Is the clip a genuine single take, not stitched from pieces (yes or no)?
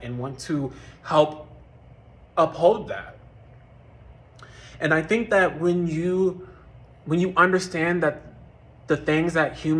yes